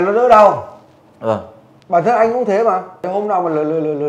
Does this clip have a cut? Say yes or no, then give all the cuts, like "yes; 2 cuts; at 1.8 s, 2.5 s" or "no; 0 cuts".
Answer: yes; 1 cut; at 3.0 s